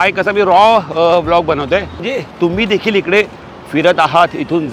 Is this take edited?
yes; 1 cut; at 2.0 s

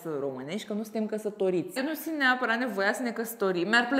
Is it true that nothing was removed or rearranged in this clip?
no; 1 cut; at 1.7 s

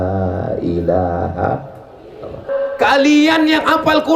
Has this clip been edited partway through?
yes; 1 cut; at 2.4 s

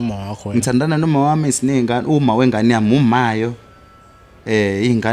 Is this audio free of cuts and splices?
yes; 0 cuts

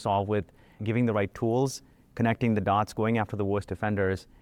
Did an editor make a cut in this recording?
no; 0 cuts

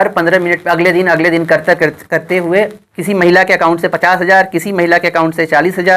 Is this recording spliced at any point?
no; 0 cuts

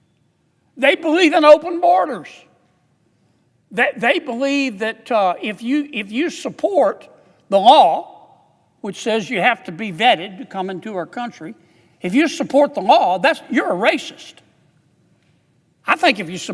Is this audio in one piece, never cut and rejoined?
yes; 0 cuts

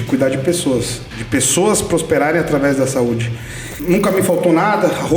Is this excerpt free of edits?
no; 1 cut; at 3.7 s

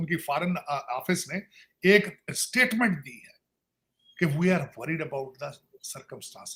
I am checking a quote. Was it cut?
no; 0 cuts

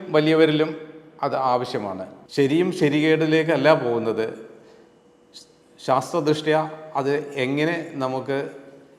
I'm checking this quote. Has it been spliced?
yes; 1 cut; at 2.1 s

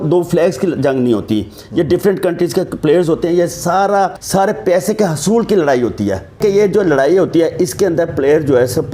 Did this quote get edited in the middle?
yes; 2 cuts; at 4.2 s, 6.4 s

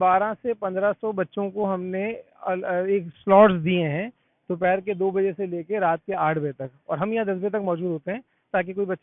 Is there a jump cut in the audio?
no; 0 cuts

